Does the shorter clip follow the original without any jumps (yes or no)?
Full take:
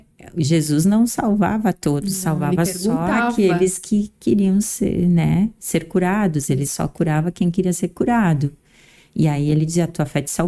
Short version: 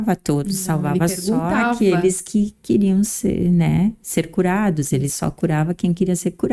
yes